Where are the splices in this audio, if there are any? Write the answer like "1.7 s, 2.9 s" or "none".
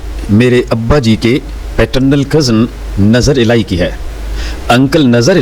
none